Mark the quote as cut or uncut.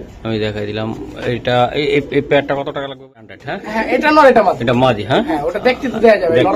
cut